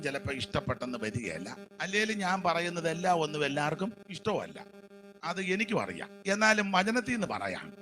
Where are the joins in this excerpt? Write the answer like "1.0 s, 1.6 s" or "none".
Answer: 1.6 s, 4.1 s, 6.1 s